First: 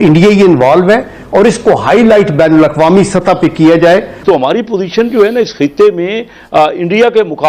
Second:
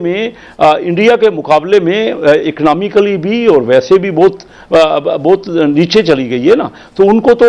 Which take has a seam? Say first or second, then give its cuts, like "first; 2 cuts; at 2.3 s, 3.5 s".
first; 1 cut; at 4.1 s